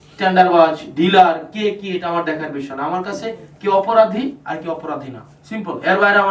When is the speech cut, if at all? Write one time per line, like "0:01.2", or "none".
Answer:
none